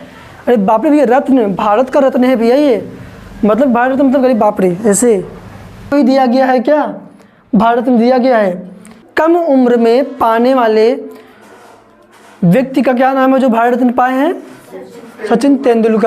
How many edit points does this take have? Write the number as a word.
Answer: two